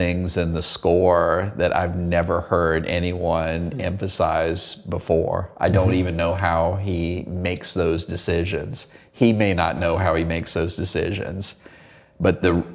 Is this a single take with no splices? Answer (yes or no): yes